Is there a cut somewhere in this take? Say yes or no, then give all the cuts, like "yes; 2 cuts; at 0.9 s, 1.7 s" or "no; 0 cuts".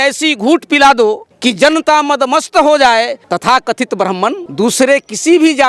yes; 3 cuts; at 1.3 s, 3.2 s, 4.4 s